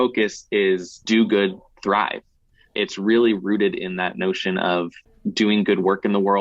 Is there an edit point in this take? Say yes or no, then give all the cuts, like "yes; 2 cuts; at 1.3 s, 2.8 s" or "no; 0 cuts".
yes; 3 cuts; at 0.9 s, 2.7 s, 5.2 s